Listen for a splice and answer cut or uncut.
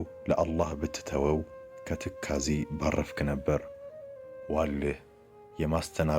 uncut